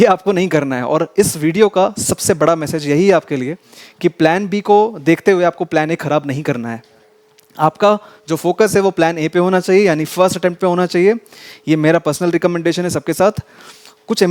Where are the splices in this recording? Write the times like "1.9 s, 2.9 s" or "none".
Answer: none